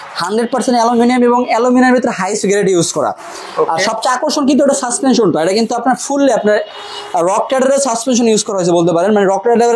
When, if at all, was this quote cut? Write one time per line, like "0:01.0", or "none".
none